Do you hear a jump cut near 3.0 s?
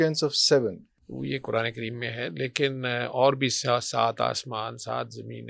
no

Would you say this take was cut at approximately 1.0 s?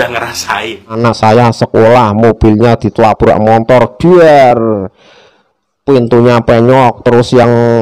yes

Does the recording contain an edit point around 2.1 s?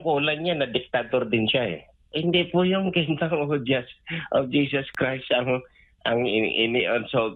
yes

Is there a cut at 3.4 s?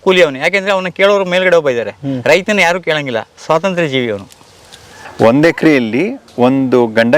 no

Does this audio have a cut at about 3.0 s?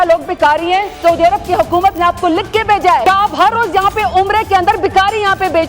yes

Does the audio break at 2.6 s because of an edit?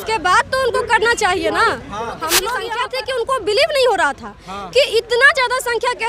yes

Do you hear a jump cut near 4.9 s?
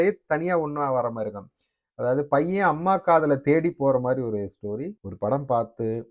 yes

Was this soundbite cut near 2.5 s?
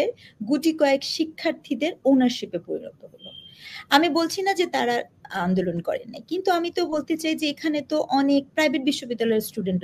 no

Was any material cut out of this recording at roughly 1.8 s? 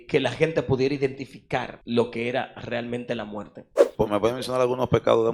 yes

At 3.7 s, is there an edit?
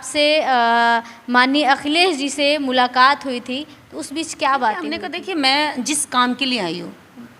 no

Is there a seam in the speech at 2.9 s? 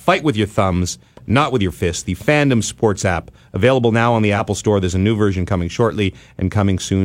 no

